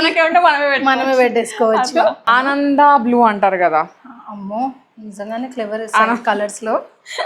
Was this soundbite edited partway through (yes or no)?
yes